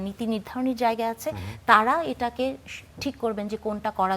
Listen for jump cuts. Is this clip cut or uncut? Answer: uncut